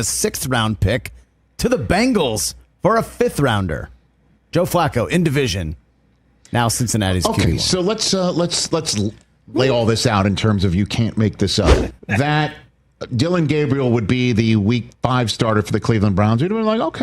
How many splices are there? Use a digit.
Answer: 1